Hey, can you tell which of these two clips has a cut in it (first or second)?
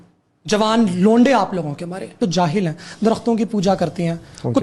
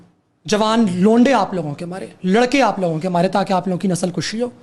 first